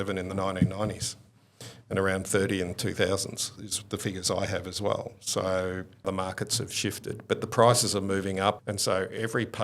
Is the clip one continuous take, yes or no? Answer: no